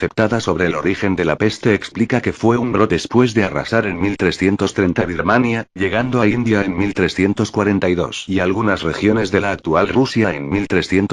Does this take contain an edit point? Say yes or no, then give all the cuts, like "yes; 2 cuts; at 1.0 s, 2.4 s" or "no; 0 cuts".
no; 0 cuts